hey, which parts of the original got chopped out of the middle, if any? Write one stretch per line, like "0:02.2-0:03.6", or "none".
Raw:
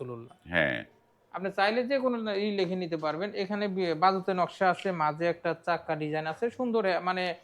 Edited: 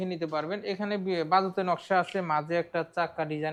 none